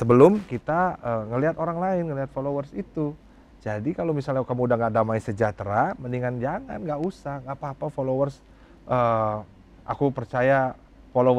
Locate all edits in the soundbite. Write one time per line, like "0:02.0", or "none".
none